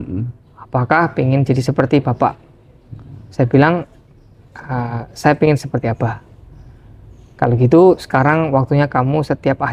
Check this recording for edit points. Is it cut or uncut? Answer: uncut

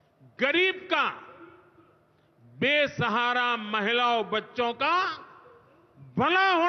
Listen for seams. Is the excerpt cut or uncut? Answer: uncut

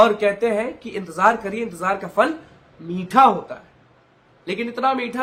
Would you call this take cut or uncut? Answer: uncut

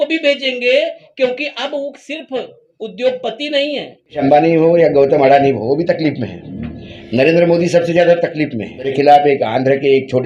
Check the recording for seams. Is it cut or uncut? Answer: cut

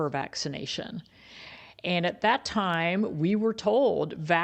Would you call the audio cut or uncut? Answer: uncut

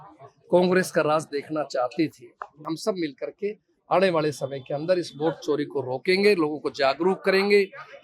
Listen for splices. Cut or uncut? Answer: cut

